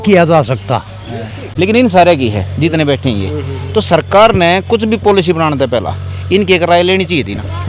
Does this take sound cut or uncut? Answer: cut